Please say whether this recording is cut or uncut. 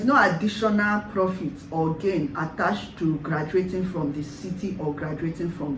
uncut